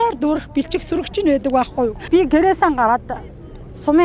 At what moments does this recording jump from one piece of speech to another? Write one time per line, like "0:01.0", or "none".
0:02.0

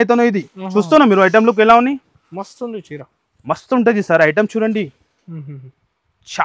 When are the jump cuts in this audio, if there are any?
none

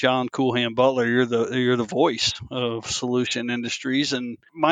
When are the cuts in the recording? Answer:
none

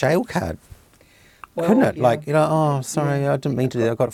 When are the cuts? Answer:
none

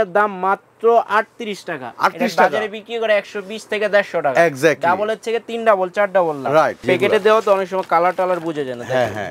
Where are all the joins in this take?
0:06.8

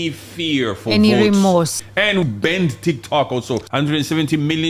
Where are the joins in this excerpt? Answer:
0:02.1
0:03.7

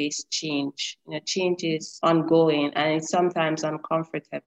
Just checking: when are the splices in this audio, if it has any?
0:01.9

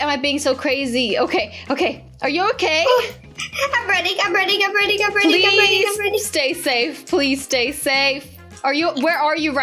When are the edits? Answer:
none

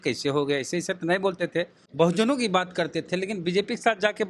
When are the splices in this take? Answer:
0:01.8

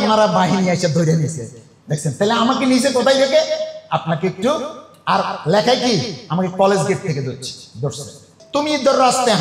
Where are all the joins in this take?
0:08.3

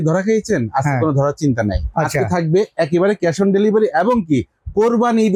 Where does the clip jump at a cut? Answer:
none

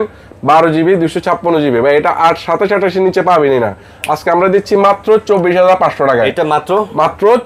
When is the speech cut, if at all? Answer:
none

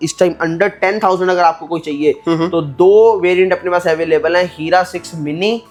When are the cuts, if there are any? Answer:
none

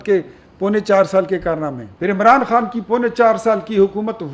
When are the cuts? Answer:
0:01.9

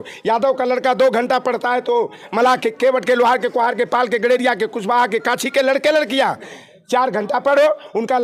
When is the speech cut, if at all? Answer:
none

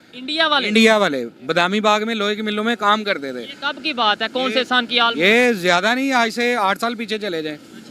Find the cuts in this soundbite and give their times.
none

